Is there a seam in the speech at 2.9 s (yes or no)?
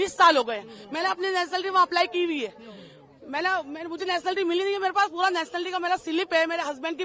no